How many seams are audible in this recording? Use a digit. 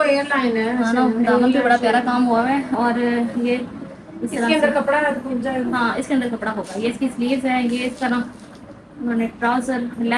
0